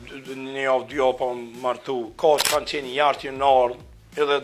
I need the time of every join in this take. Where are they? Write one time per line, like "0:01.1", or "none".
0:02.4